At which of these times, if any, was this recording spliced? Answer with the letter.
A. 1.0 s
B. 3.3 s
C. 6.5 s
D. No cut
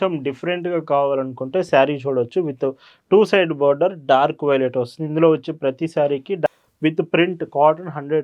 C